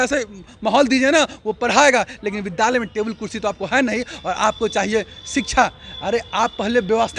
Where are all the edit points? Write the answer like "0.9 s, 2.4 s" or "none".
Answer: none